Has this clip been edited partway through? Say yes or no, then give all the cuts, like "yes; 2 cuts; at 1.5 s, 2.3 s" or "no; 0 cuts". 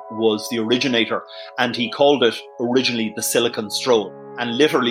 no; 0 cuts